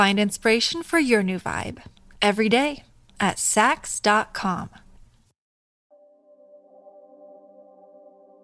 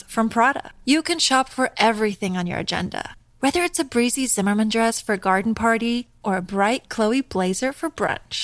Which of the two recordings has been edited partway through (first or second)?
first